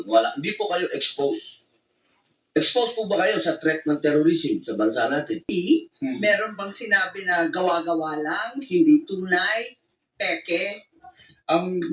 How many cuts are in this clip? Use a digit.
1